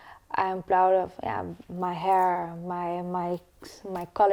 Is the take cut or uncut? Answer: uncut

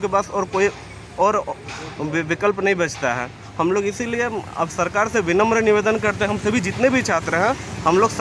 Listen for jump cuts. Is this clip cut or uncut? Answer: uncut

